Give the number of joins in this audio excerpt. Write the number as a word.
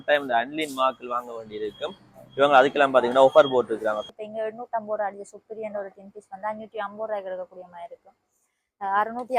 one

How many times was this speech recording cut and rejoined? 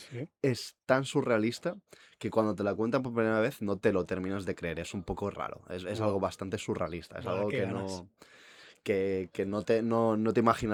zero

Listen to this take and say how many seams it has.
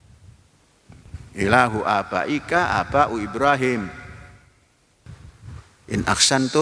one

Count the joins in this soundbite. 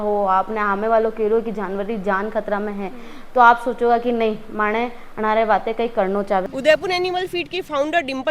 one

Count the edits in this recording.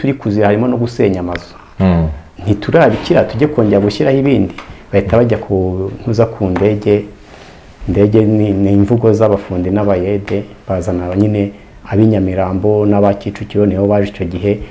zero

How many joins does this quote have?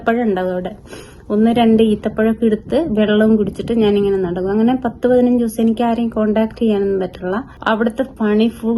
one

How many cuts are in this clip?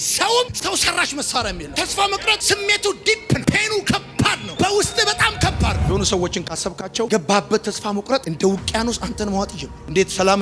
one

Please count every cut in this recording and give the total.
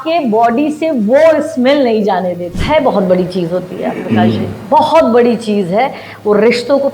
one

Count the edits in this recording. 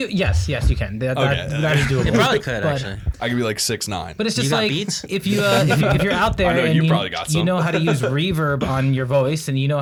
zero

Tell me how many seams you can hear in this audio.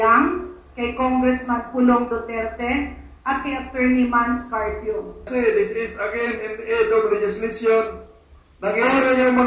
one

